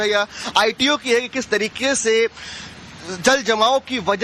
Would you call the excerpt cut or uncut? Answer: cut